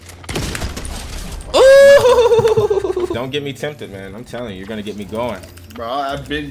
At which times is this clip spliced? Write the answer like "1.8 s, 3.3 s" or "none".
3.1 s